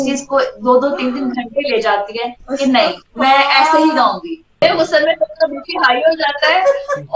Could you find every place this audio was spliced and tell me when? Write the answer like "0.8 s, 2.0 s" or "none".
4.6 s